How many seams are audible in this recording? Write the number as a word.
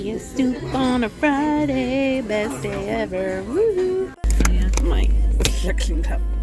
one